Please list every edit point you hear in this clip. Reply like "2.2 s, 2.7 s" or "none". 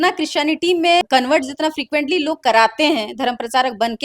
1.0 s